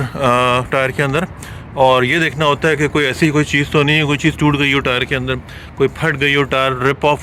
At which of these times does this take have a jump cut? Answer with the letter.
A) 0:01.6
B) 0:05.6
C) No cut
C